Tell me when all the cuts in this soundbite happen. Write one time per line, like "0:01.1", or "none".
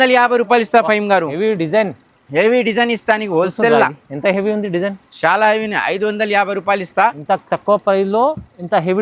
none